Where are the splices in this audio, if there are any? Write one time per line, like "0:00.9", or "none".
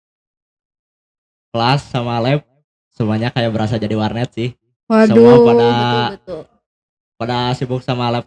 none